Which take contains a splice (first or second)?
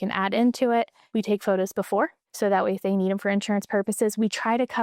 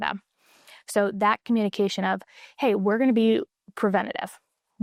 first